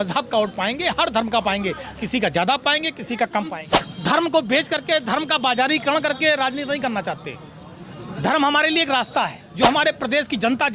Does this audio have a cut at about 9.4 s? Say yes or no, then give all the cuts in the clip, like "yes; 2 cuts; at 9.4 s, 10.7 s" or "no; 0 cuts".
yes; 2 cuts; at 3.5 s, 9.4 s